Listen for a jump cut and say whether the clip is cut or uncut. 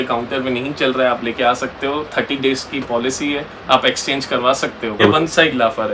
cut